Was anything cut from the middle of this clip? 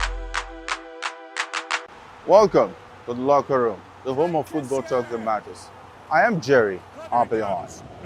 yes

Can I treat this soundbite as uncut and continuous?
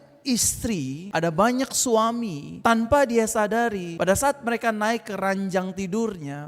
no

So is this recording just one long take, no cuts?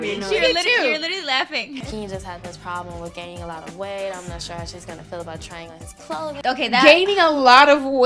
no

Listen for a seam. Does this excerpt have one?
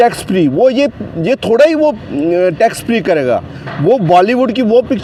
no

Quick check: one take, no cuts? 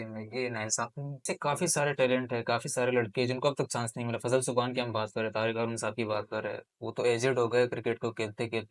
no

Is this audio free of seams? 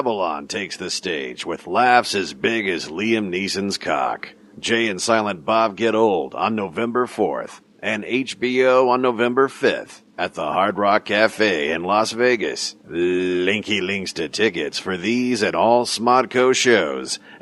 no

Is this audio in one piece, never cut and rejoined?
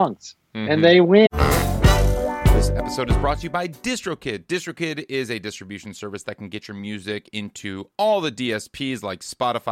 no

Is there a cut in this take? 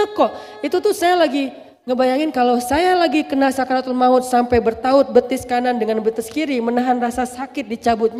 no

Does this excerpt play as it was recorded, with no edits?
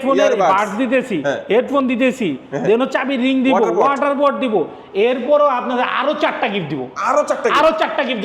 yes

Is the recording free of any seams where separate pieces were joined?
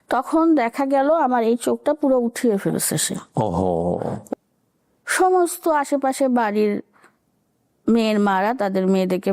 no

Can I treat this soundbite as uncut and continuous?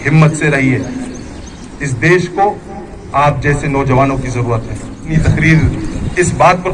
no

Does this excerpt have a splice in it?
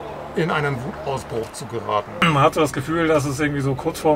yes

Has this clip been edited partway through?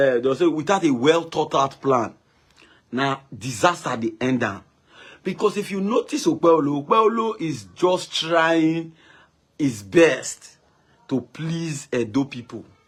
no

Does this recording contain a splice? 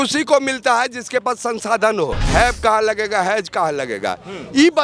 yes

